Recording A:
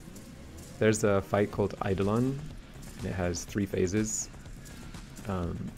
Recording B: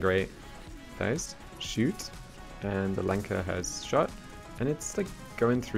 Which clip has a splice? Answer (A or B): B